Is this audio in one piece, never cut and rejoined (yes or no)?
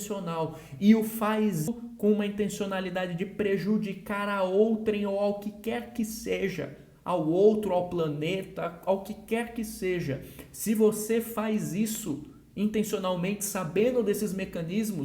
no